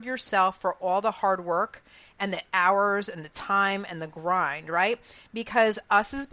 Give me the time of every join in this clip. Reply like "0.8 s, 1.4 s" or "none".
none